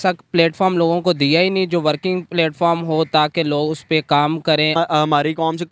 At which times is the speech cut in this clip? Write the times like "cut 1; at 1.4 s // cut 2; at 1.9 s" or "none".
cut 1; at 4.7 s